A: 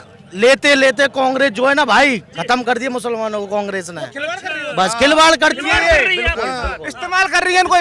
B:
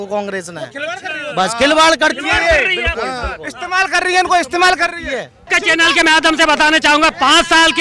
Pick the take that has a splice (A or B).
B